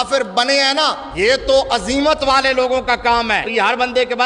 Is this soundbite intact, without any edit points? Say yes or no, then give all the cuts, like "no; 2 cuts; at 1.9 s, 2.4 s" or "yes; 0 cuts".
no; 2 cuts; at 1.0 s, 3.5 s